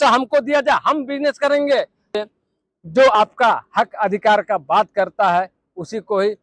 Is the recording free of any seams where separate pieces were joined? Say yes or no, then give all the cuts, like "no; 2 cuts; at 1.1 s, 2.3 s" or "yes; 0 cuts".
no; 1 cut; at 2.1 s